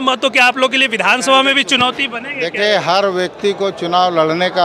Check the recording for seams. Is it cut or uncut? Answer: uncut